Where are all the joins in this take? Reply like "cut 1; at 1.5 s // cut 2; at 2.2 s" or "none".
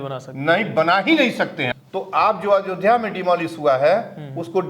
cut 1; at 1.6 s